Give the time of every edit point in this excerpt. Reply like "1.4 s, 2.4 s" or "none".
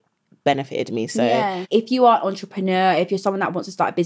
1.6 s